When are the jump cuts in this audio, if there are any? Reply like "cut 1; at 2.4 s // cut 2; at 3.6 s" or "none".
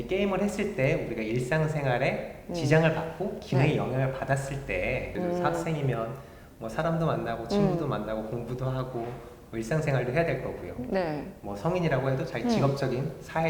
cut 1; at 5.1 s